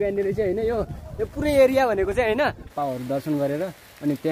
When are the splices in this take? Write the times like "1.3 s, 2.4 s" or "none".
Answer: 2.7 s